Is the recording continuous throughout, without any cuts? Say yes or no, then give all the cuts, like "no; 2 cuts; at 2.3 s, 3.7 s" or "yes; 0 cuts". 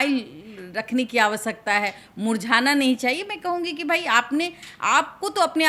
yes; 0 cuts